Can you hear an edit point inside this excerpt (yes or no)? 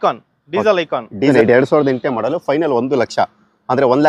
yes